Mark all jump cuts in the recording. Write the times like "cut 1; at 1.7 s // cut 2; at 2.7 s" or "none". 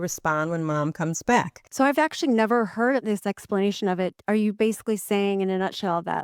cut 1; at 1.6 s // cut 2; at 3.0 s // cut 3; at 4.2 s